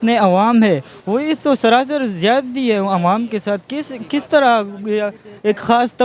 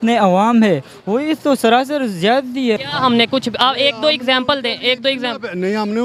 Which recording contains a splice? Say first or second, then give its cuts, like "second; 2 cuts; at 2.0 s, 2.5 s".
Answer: second; 1 cut; at 2.8 s